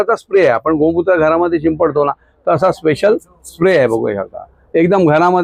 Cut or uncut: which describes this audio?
uncut